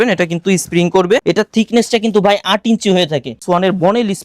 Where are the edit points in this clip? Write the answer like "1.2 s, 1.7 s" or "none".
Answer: 1.2 s, 3.4 s